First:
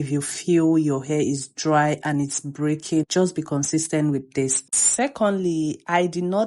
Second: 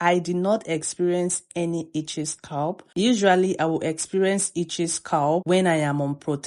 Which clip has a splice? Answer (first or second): first